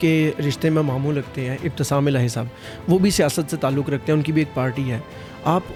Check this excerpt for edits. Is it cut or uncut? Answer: uncut